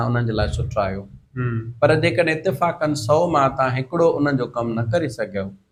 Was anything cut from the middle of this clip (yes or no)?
no